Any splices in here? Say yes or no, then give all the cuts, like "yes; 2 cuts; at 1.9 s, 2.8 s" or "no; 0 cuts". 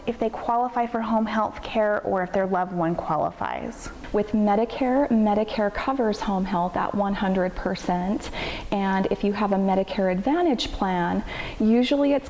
yes; 1 cut; at 3.9 s